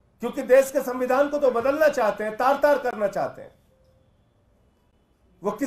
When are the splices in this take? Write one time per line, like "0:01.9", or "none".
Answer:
none